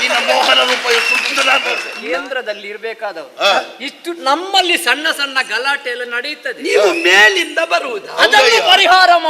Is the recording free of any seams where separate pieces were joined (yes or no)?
no